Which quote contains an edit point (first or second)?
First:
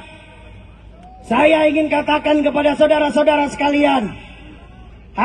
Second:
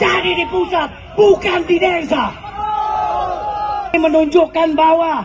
second